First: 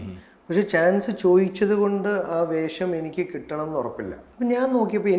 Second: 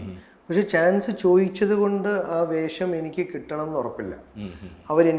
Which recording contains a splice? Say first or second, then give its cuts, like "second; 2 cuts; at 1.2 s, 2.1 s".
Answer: first; 1 cut; at 4.2 s